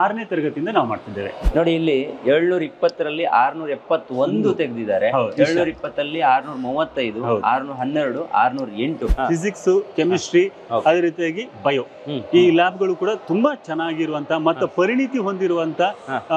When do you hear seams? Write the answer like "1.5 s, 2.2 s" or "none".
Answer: 1.4 s, 9.1 s